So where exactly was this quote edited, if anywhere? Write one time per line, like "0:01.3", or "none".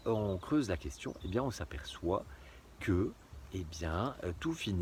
none